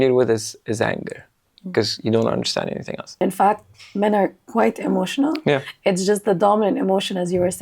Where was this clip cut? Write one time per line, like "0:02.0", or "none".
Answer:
0:03.2